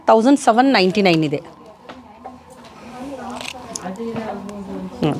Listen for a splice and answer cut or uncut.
uncut